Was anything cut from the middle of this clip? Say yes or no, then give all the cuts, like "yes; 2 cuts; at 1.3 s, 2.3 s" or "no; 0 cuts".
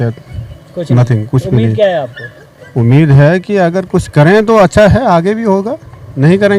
no; 0 cuts